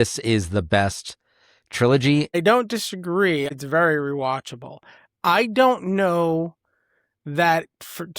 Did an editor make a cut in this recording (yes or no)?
yes